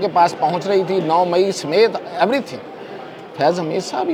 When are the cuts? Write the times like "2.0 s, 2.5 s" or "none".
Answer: none